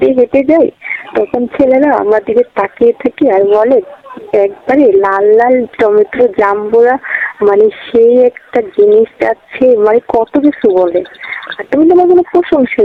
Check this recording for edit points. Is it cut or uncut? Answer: uncut